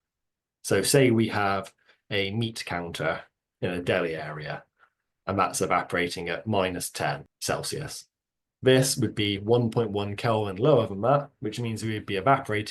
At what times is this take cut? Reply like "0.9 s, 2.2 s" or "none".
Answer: 7.3 s